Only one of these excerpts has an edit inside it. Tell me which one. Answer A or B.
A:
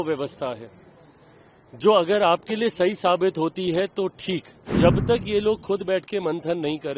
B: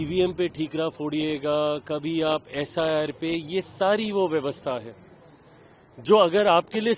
A